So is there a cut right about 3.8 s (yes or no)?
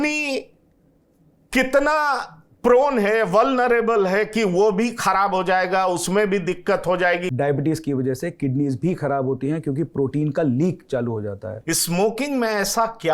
no